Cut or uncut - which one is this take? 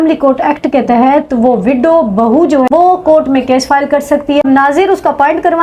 cut